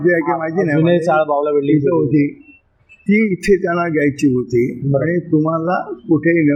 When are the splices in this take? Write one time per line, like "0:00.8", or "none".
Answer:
none